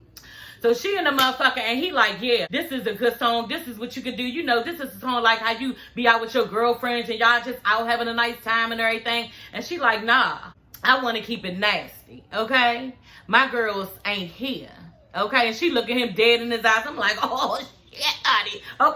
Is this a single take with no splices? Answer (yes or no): no